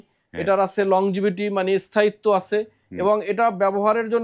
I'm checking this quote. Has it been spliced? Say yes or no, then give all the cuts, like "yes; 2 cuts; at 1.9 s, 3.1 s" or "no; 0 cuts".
no; 0 cuts